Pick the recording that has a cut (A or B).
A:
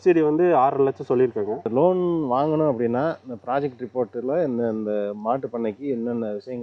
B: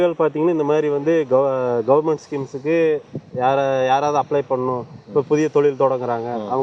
A